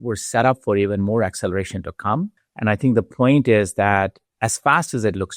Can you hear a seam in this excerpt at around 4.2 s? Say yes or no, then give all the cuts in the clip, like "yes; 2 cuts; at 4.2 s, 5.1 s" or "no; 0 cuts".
yes; 2 cuts; at 2.4 s, 4.2 s